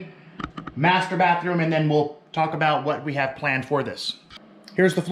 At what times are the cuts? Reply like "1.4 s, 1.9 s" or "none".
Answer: none